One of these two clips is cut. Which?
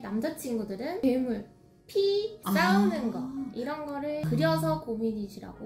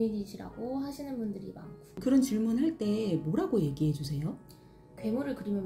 second; 1 cut; at 2.0 s

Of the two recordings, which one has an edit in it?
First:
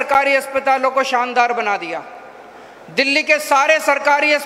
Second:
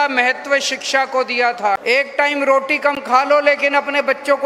second; 1 cut; at 1.8 s

